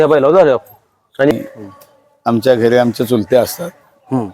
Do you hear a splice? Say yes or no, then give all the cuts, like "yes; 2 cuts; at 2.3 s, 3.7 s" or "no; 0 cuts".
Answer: yes; 1 cut; at 1.3 s